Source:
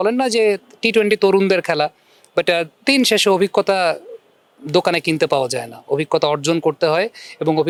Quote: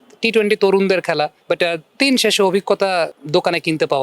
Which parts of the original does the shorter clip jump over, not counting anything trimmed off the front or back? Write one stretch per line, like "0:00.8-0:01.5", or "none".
0:02.0-0:02.2
0:04.1-0:04.6